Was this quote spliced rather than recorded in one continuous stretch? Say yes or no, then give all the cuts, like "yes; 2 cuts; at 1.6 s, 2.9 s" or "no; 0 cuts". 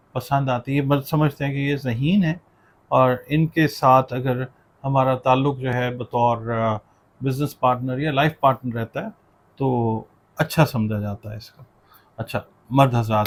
no; 0 cuts